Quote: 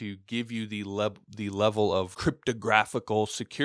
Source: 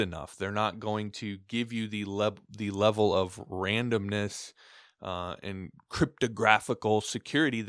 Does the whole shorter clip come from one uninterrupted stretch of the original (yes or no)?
no